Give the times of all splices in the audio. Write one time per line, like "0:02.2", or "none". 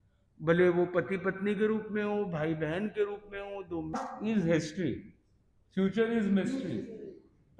0:04.0

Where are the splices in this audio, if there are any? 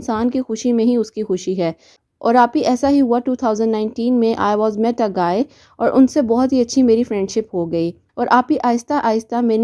none

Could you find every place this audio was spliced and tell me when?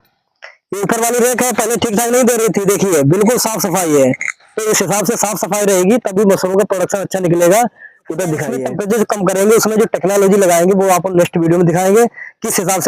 0:08.5

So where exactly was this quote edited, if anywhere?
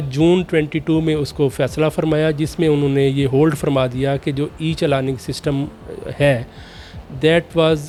none

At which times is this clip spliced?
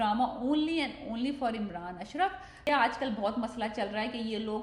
0:02.7

